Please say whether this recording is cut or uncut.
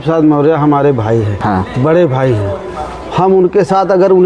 cut